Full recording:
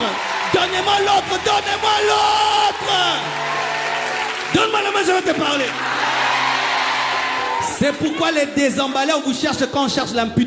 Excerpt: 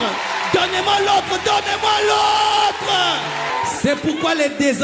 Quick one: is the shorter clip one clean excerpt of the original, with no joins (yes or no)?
no